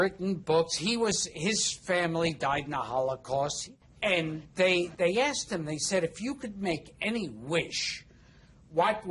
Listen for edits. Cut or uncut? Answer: cut